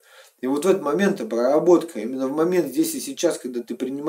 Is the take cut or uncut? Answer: uncut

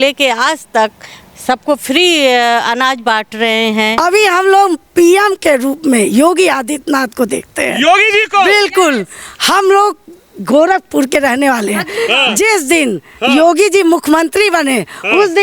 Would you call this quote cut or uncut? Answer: cut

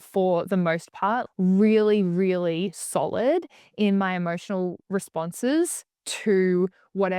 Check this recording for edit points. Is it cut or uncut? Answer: cut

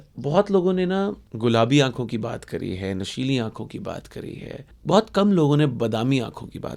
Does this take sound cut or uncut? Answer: cut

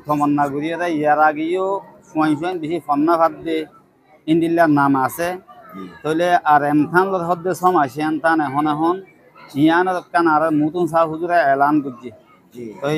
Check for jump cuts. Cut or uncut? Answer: uncut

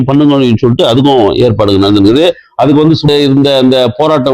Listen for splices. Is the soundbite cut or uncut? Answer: cut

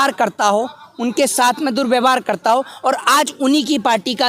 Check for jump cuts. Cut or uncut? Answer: uncut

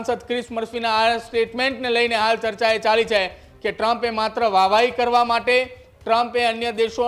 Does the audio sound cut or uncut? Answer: uncut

